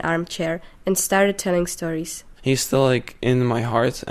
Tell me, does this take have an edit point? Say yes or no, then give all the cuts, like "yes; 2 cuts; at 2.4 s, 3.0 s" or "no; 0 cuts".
yes; 1 cut; at 2.2 s